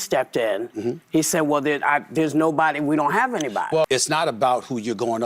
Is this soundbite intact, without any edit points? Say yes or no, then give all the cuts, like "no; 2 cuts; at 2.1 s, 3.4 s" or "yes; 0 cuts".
no; 1 cut; at 3.9 s